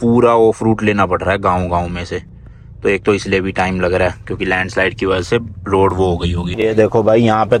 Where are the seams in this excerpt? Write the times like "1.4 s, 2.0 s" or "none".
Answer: none